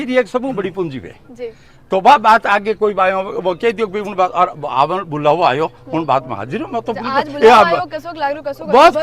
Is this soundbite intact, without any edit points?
yes; 0 cuts

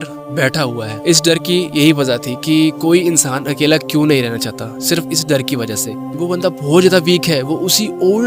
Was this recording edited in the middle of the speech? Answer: yes; 2 cuts; at 0.9 s, 6.1 s

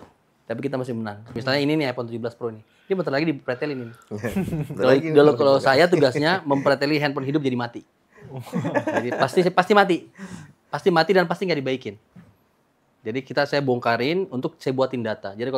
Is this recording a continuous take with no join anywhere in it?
no; 1 cut; at 1.3 s

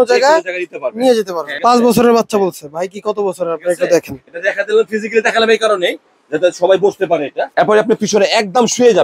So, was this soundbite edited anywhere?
yes; 2 cuts; at 1.5 s, 7.4 s

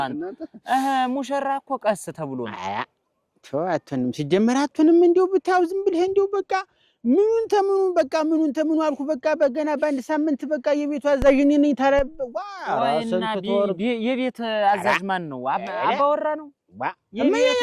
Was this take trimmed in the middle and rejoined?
no; 0 cuts

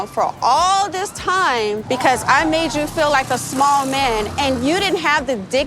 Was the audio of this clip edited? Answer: yes; 1 cut; at 1.8 s

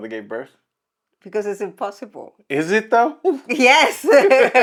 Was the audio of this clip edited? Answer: no; 0 cuts

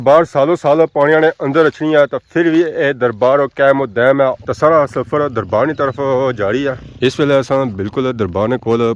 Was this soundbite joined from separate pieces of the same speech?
yes; 1 cut; at 4.4 s

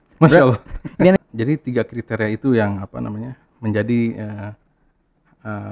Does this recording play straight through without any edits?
no; 1 cut; at 1.2 s

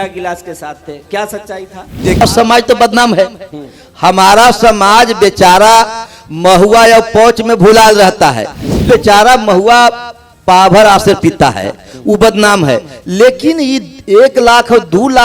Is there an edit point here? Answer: yes; 2 cuts; at 2.2 s, 8.8 s

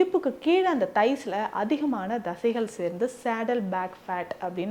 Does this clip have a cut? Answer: no; 0 cuts

